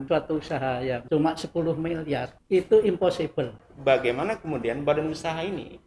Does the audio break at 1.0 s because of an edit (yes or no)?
yes